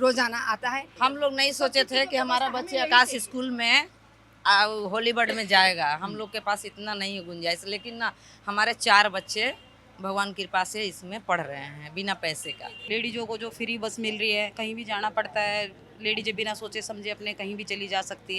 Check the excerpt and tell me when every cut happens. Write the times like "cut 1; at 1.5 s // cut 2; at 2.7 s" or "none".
cut 1; at 0.9 s // cut 2; at 12.8 s